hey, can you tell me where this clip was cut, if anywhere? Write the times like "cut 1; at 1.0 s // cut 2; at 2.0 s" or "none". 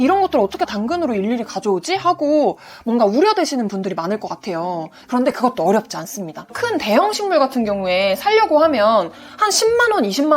cut 1; at 6.5 s